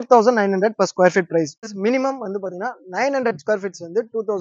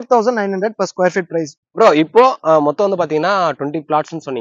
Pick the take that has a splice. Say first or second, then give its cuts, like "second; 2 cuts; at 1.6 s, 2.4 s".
first; 1 cut; at 1.6 s